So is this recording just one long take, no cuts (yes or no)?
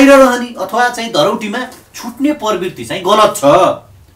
yes